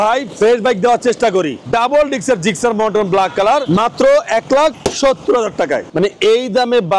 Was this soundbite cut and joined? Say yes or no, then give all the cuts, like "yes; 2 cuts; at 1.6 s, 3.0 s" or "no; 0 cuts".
yes; 2 cuts; at 1.6 s, 5.9 s